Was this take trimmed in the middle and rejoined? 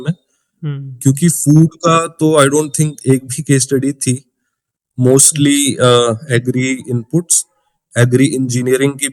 no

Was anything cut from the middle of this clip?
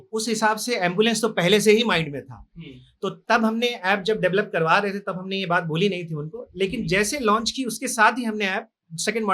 no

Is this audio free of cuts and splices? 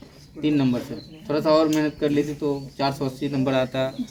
yes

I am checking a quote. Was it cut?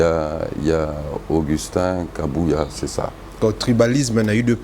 yes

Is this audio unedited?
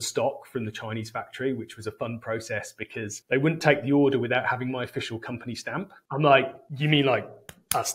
no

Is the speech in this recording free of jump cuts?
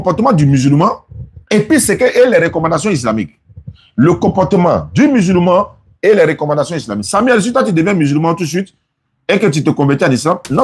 yes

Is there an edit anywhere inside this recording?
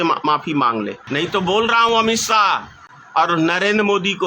yes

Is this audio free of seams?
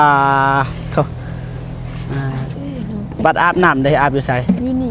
yes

